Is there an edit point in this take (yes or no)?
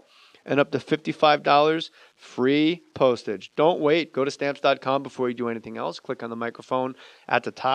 no